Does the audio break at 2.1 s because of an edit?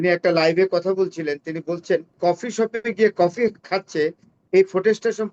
yes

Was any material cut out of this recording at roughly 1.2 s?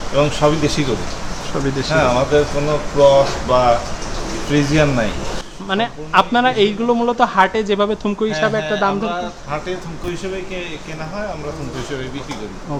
no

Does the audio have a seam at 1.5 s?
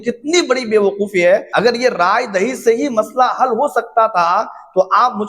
yes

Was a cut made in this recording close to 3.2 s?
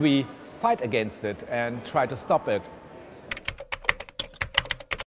yes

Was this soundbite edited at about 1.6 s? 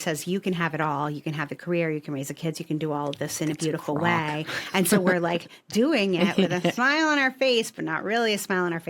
no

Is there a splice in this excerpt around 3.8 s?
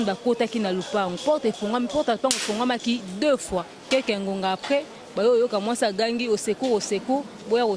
yes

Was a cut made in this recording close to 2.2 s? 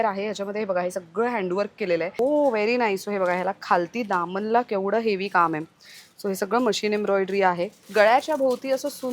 yes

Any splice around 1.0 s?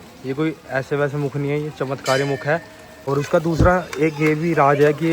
no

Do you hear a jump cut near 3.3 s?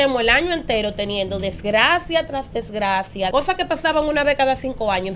yes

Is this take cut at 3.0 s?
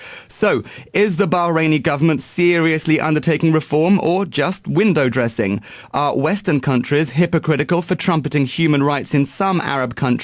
yes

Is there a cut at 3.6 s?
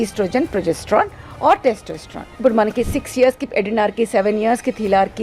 no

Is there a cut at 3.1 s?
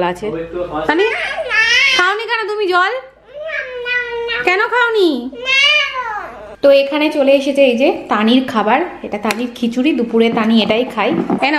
no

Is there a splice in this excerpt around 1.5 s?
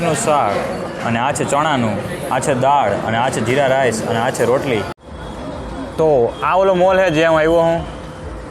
no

